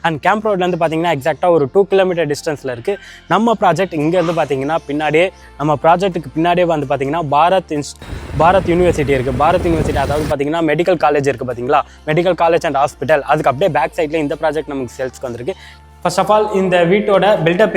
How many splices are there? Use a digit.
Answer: 1